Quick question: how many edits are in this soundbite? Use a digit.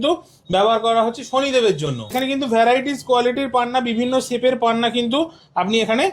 1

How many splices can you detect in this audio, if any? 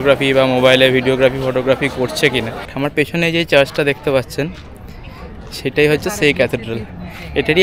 1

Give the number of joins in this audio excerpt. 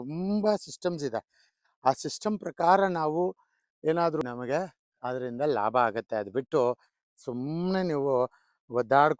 1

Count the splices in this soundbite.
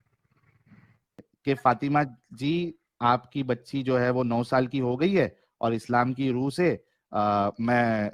1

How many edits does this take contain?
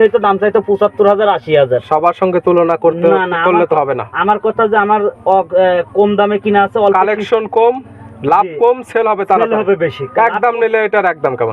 0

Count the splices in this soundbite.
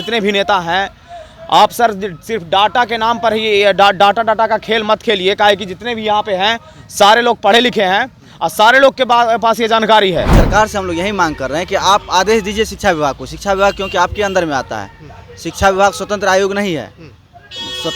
1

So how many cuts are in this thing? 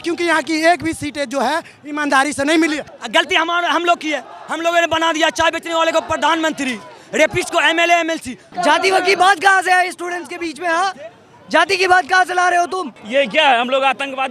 3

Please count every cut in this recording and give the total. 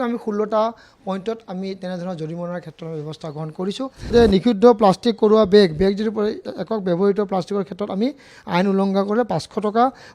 1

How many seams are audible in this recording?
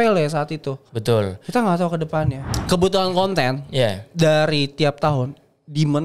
1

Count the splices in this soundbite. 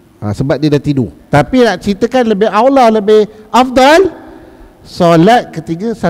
1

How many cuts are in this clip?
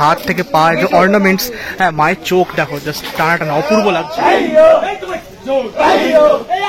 0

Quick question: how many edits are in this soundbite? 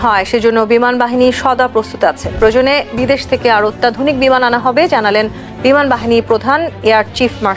0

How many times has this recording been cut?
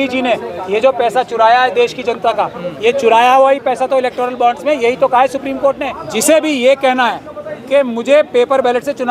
1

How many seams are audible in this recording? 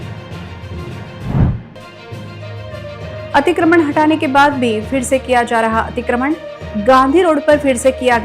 1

